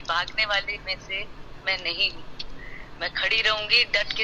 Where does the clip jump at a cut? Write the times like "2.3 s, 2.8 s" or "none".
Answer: none